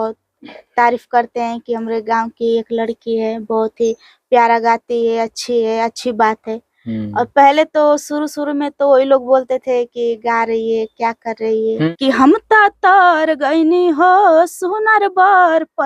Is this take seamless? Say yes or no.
no